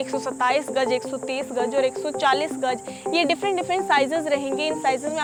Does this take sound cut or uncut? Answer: uncut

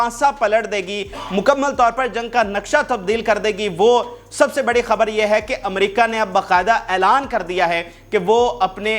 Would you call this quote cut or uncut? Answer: uncut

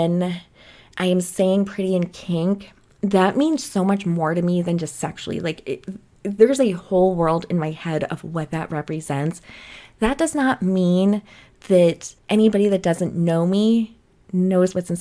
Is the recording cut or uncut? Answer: uncut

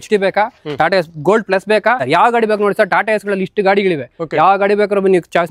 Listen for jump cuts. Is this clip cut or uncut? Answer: cut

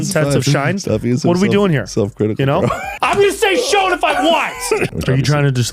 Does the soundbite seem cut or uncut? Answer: cut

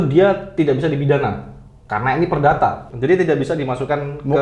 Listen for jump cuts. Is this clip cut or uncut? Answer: uncut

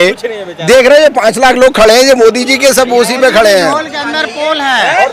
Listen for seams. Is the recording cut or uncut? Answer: uncut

